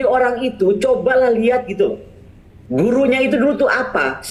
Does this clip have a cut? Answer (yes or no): no